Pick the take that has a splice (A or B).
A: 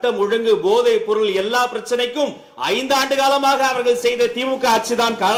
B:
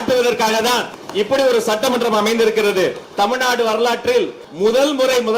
B